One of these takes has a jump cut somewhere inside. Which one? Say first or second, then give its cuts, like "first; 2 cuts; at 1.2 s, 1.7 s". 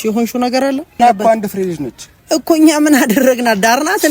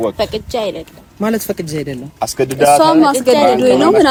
first; 1 cut; at 1.0 s